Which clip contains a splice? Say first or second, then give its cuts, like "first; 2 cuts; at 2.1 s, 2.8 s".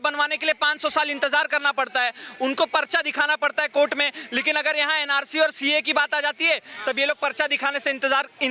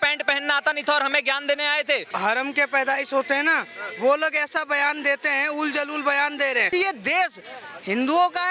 second; 2 cuts; at 2.1 s, 6.7 s